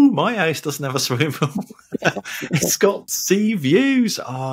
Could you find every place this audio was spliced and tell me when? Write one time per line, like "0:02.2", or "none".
0:03.1